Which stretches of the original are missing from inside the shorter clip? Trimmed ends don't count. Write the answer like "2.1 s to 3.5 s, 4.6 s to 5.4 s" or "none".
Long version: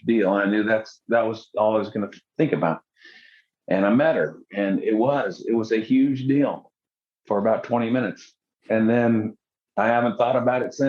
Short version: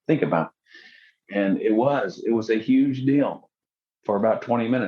3.5 s to 4.4 s